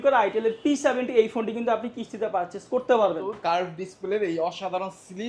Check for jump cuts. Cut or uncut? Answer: cut